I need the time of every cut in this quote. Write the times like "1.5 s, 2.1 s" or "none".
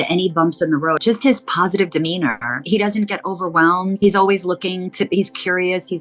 1.0 s, 2.6 s, 4.0 s